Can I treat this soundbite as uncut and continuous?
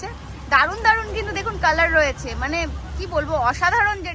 yes; 0 cuts

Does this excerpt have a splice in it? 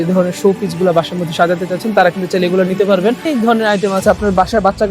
yes; 1 cut; at 3.2 s

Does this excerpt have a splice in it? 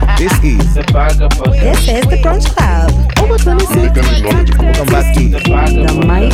no; 0 cuts

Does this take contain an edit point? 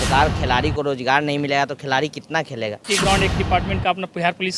yes; 1 cut; at 2.8 s

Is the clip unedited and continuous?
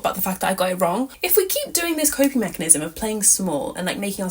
no; 1 cut; at 1.2 s

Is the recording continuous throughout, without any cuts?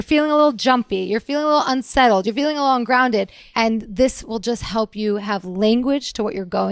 no; 1 cut; at 3.4 s

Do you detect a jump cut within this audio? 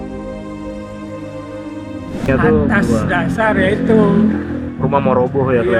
yes; 1 cut; at 2.3 s

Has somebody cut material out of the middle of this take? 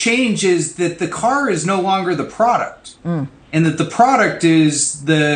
no; 0 cuts

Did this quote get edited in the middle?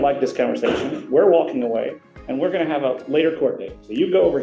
no; 0 cuts

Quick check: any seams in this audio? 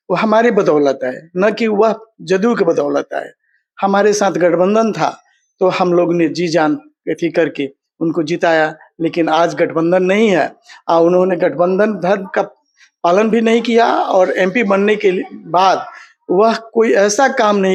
no; 0 cuts

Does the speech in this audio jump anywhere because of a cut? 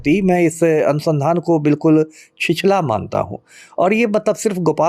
no; 0 cuts

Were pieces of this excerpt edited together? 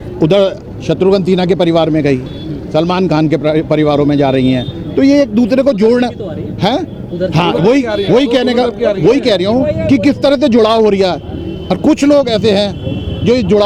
no; 0 cuts

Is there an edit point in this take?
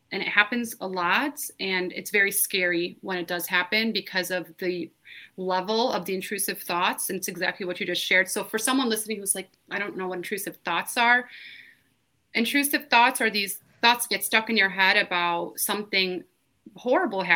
no; 0 cuts

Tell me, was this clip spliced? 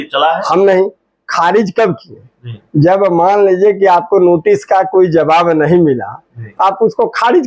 no; 0 cuts

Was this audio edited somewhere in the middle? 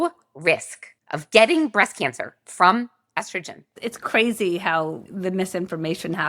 yes; 1 cut; at 5.1 s

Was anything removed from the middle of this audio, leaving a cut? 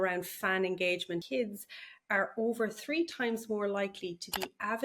yes; 1 cut; at 1.2 s

